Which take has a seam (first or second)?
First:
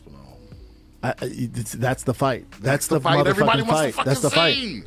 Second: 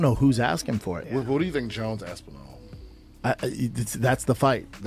second